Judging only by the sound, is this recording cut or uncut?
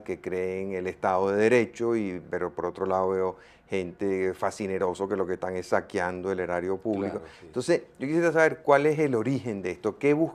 cut